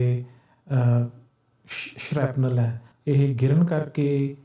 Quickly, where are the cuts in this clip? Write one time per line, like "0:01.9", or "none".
0:02.9